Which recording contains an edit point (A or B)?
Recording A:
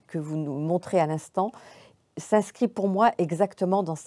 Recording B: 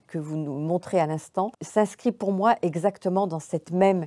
B